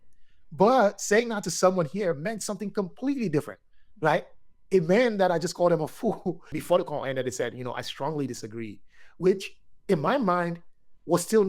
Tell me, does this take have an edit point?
yes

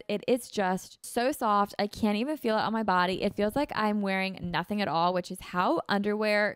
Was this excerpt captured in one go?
no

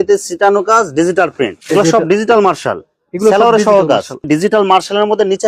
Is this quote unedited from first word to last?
no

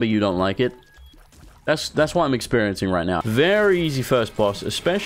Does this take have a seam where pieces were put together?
yes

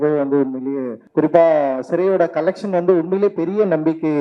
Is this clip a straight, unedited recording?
no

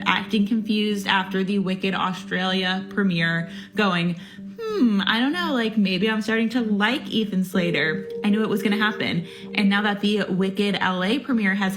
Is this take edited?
no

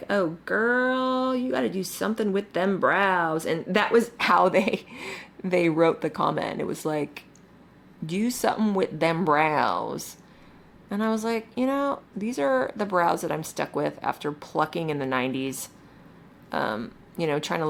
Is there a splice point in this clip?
no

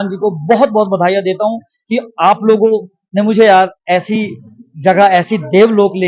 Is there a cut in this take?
no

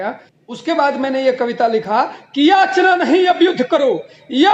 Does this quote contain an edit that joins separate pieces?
no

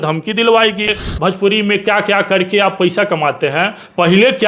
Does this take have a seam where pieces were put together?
yes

